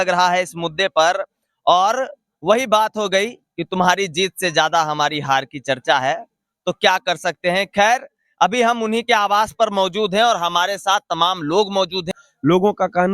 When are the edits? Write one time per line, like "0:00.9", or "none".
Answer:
0:12.1

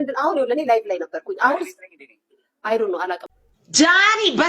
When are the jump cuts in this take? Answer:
0:03.4

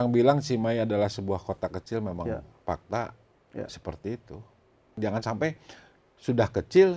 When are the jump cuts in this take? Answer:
0:04.8

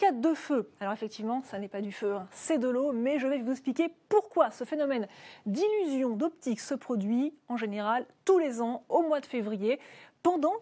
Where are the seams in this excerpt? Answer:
none

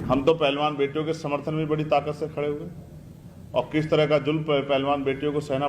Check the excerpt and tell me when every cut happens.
none

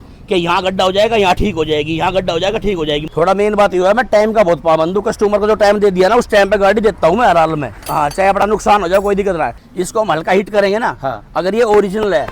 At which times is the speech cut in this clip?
0:03.1
0:07.7
0:09.7

